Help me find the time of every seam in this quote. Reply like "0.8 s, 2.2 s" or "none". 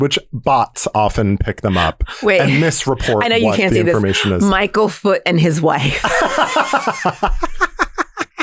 none